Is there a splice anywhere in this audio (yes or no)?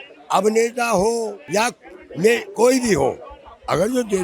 yes